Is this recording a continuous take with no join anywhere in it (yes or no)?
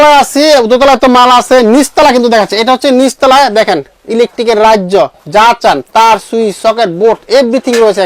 yes